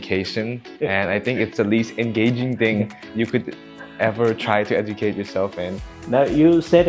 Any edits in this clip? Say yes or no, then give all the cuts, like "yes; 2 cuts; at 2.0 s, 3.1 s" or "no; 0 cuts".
yes; 1 cut; at 5.9 s